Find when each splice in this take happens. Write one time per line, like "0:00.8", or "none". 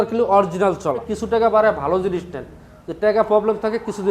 0:01.1